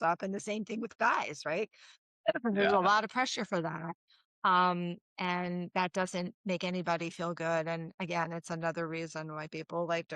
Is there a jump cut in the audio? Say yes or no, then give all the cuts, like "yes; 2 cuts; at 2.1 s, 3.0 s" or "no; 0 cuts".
yes; 1 cut; at 6.4 s